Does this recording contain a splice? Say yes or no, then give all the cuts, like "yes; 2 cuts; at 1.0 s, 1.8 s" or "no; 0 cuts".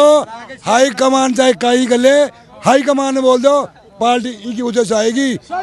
no; 0 cuts